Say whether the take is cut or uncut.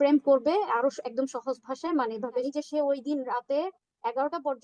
cut